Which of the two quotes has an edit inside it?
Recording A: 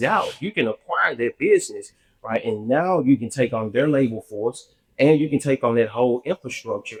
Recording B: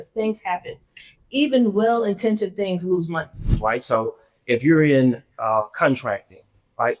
B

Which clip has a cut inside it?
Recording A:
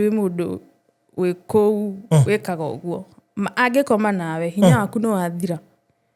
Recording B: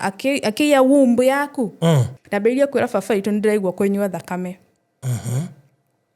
B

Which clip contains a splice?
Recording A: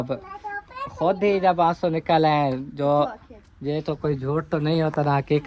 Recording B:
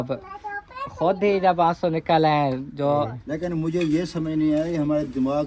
B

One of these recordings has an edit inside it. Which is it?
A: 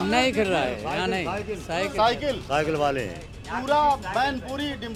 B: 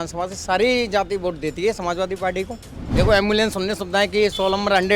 B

